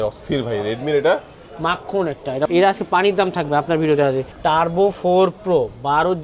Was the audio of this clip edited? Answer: yes; 2 cuts; at 2.5 s, 4.3 s

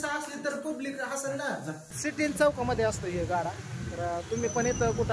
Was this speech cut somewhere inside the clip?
yes; 1 cut; at 1.8 s

